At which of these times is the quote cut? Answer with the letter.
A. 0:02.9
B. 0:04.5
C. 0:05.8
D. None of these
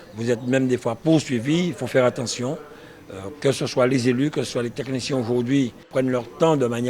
C